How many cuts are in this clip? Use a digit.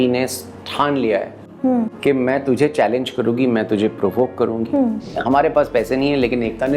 1